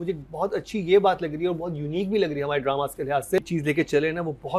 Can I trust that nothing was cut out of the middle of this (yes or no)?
no